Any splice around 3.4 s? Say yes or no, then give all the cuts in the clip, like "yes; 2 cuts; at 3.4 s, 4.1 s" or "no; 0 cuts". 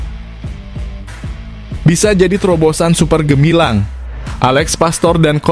no; 1 cut; at 1.8 s